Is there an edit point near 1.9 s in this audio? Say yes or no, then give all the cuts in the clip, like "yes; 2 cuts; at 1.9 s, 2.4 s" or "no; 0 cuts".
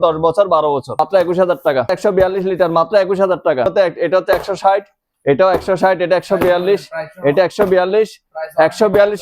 yes; 3 cuts; at 1.0 s, 1.9 s, 3.7 s